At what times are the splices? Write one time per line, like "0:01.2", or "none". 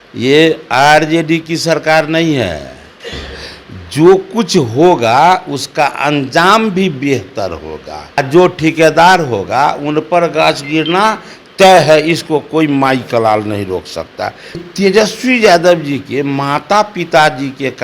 0:08.0
0:14.6